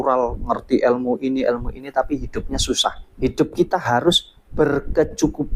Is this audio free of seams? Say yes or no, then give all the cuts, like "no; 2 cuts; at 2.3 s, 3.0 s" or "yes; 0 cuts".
no; 1 cut; at 3.1 s